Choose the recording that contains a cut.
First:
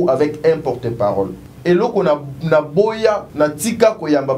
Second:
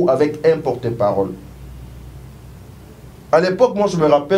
first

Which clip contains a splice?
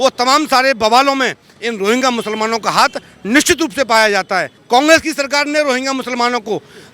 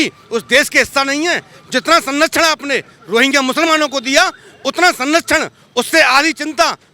first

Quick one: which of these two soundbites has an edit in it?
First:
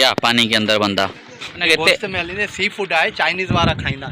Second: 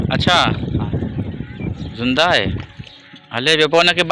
first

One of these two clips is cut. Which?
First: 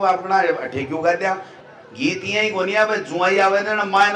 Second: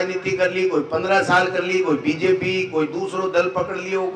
first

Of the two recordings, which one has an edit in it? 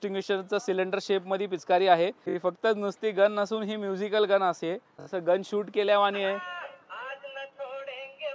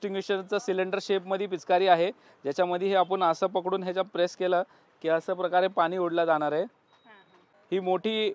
first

